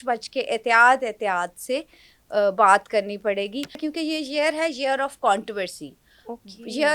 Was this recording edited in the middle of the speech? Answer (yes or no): yes